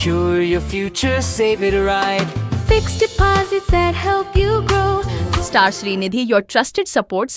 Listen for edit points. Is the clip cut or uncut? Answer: cut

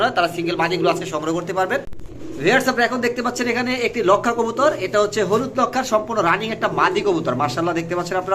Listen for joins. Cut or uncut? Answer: cut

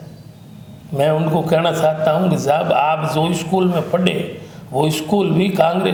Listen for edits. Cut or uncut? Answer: uncut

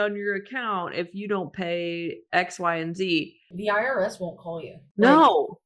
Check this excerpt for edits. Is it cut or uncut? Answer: cut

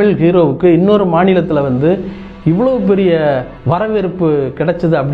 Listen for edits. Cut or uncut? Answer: cut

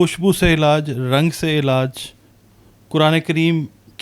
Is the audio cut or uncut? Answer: uncut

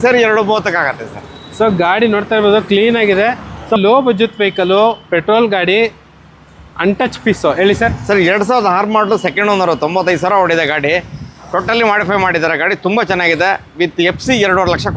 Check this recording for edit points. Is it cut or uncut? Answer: cut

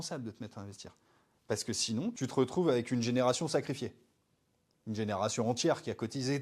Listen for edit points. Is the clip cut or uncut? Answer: cut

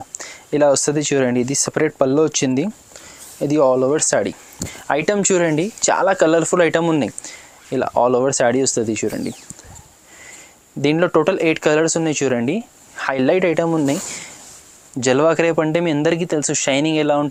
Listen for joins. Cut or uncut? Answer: uncut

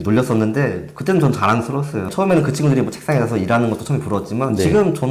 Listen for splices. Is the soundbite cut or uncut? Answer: cut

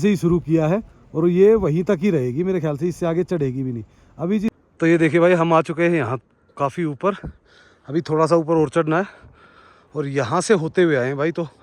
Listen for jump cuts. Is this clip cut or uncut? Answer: cut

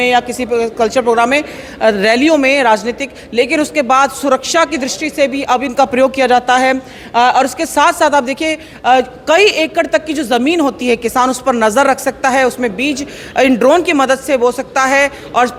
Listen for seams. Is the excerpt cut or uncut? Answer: uncut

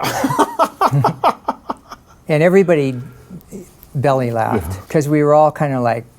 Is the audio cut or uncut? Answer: cut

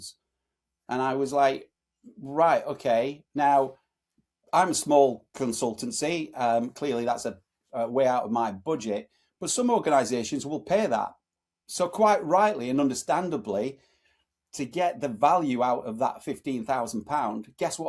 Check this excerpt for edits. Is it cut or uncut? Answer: uncut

